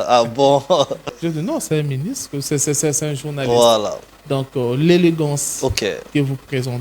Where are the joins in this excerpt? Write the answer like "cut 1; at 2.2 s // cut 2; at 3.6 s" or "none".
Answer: cut 1; at 1.1 s